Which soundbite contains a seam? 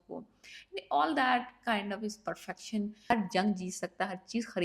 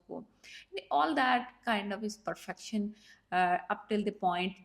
first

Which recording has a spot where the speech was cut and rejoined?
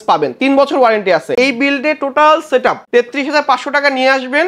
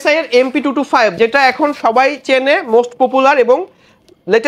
first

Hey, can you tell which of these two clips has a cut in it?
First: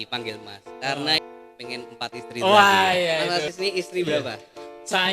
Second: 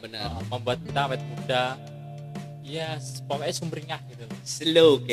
first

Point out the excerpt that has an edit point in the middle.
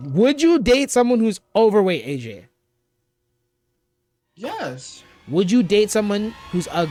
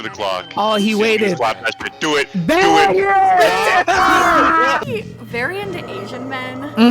second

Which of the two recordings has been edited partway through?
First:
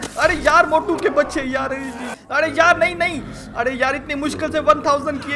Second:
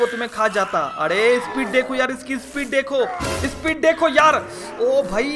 first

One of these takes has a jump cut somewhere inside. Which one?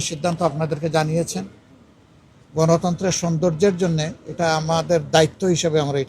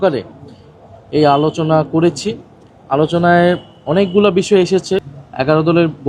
second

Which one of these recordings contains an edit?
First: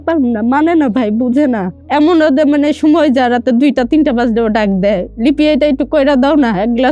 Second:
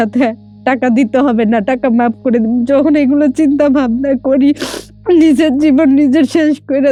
first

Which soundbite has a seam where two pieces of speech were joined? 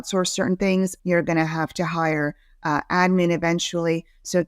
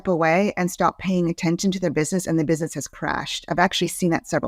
first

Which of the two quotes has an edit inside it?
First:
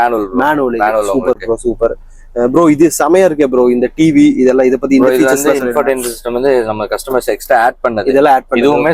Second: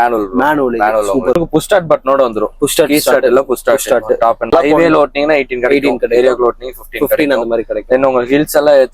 second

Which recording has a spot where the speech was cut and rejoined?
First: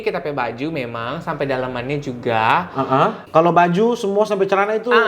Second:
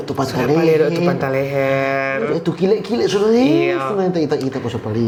first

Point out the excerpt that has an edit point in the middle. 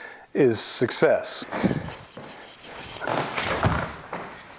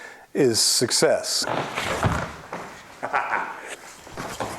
second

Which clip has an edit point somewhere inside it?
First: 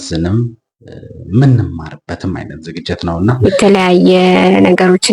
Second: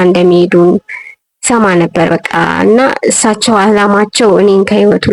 first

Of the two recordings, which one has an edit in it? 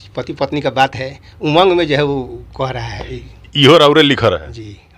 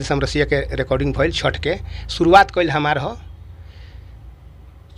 first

